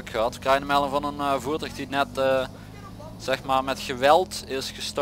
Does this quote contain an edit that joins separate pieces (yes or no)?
no